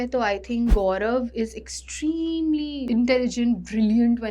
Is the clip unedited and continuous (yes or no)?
no